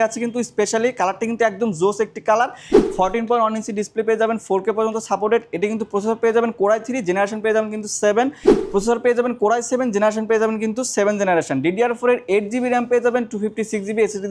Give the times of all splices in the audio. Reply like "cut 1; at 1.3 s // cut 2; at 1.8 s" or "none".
cut 1; at 2.7 s // cut 2; at 8.5 s